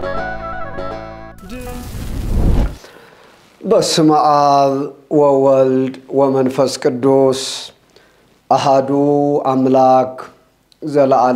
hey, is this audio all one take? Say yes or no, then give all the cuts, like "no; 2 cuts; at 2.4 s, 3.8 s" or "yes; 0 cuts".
no; 1 cut; at 1.8 s